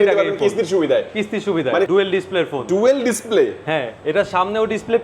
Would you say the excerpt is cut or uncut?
cut